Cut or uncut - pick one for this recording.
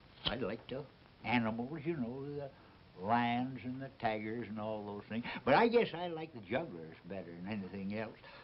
cut